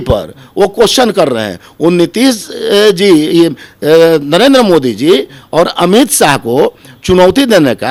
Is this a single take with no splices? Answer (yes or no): yes